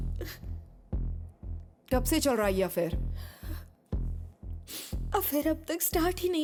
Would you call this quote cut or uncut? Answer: uncut